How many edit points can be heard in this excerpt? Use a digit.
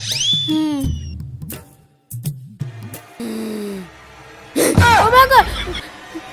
1